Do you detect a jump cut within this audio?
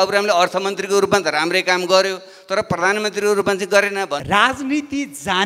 yes; 1 cut; at 4.2 s

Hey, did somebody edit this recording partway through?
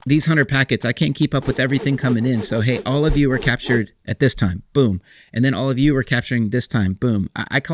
no; 0 cuts

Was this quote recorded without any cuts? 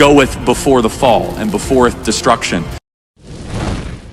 no; 1 cut; at 2.9 s

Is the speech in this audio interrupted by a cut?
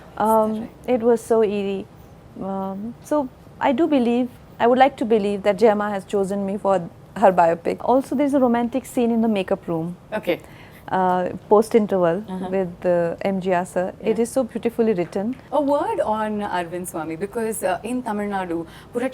yes; 2 cuts; at 7.8 s, 15.4 s

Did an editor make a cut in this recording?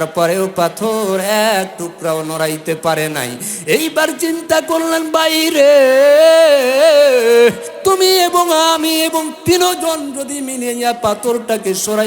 yes; 1 cut; at 7.7 s

